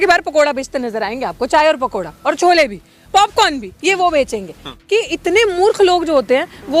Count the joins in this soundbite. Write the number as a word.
one